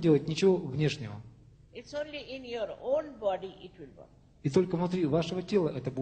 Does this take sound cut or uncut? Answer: uncut